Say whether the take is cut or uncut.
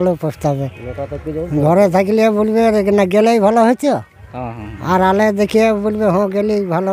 uncut